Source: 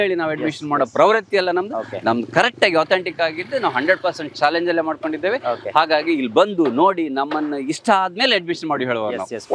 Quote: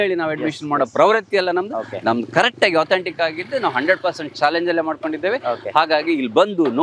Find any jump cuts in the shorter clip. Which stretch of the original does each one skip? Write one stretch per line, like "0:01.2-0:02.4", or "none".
none